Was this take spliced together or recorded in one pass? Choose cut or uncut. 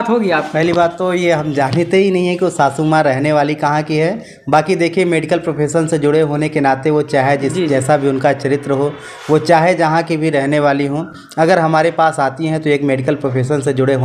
uncut